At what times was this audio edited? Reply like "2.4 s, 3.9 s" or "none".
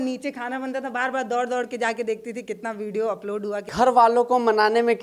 3.6 s